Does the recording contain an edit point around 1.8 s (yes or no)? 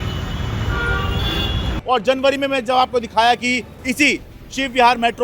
yes